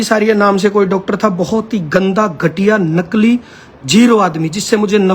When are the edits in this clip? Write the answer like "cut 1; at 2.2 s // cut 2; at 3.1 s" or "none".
none